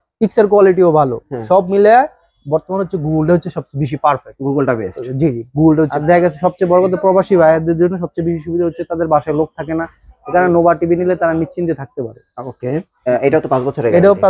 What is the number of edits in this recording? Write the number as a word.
two